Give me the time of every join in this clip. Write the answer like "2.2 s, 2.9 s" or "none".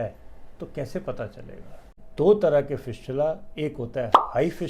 2.0 s